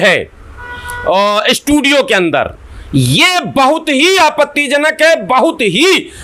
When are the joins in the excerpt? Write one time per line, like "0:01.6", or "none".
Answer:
none